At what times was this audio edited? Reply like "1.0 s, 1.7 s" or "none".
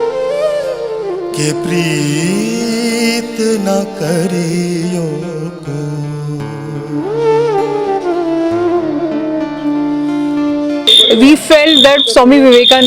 10.9 s